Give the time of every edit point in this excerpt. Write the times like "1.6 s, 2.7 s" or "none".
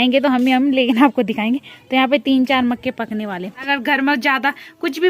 3.6 s